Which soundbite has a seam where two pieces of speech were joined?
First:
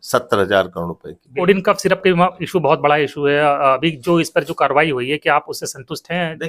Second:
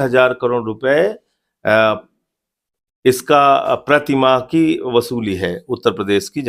first; 1 cut; at 1.3 s

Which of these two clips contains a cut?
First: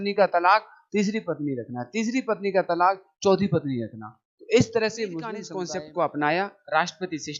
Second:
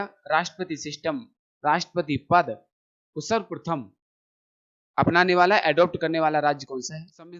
first; 1 cut; at 5.5 s

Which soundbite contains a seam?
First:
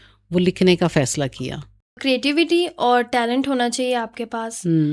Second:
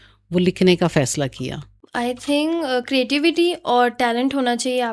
first; 1 cut; at 2.0 s

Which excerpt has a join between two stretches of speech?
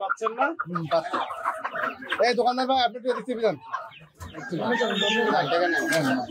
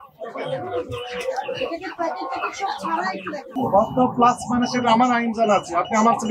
second; 1 cut; at 3.5 s

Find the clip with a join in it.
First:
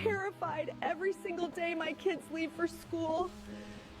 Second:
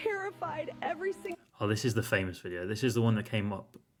first; 1 cut; at 1.4 s

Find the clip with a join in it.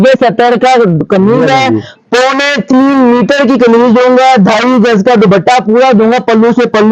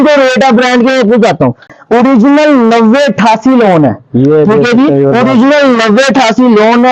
second; 1 cut; at 1.6 s

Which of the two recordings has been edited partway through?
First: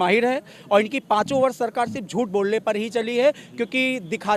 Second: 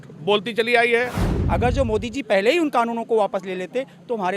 second; 1 cut; at 1.3 s

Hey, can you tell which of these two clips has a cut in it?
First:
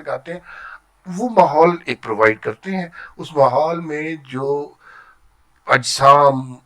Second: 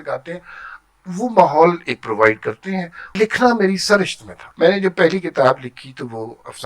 second; 2 cuts; at 3.1 s, 4.4 s

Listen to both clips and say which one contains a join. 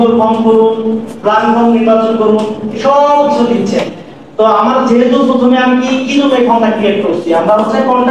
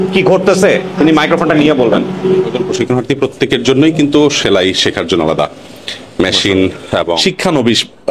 second; 2 cuts; at 2.6 s, 7.2 s

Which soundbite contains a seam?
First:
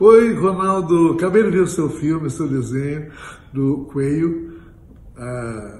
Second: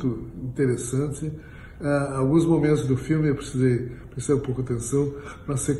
first; 2 cuts; at 1.2 s, 4.7 s

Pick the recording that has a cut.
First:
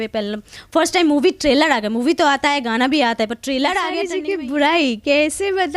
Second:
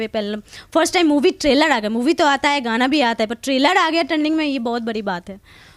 first; 1 cut; at 4.1 s

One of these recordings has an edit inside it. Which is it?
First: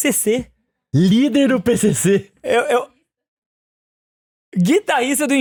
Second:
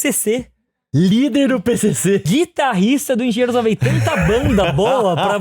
second; 1 cut; at 2.2 s

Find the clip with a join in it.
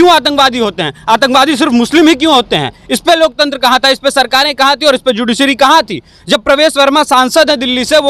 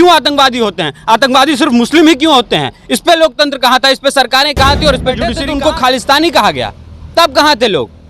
second; 1 cut; at 5.3 s

